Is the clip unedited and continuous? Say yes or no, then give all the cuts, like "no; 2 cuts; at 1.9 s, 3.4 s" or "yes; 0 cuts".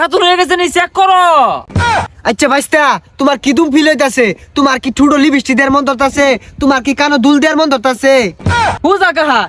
yes; 0 cuts